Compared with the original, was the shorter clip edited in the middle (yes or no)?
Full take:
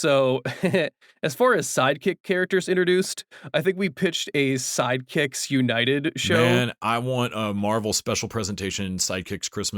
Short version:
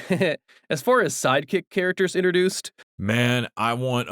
yes